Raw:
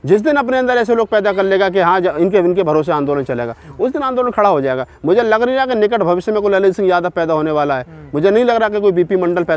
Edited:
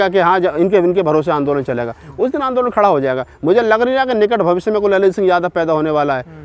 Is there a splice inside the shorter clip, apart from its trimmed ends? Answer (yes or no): no